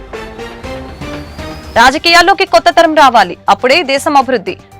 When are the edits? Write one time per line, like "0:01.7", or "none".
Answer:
0:01.6